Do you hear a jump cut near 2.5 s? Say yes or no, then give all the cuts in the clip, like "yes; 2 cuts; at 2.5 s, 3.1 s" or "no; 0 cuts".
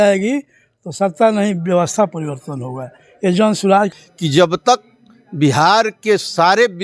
no; 1 cut; at 3.9 s